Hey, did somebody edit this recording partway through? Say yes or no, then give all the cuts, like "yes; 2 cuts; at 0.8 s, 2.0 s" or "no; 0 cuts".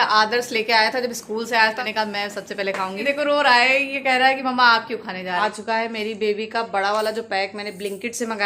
yes; 3 cuts; at 1.8 s, 3.0 s, 5.4 s